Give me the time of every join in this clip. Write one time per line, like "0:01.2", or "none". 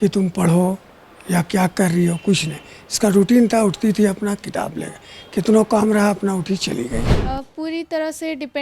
0:07.2